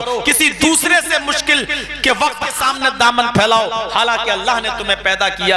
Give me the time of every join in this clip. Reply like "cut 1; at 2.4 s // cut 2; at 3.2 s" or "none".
cut 1; at 2.5 s